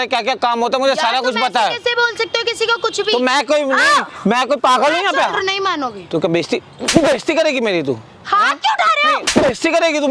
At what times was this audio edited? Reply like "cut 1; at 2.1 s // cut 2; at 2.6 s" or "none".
cut 1; at 5.3 s